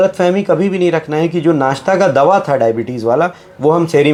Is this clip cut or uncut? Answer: uncut